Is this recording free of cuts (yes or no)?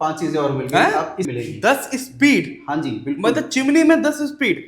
no